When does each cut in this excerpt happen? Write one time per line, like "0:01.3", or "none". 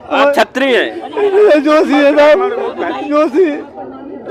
none